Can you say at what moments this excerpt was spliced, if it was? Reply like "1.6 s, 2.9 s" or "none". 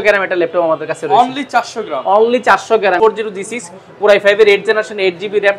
3.0 s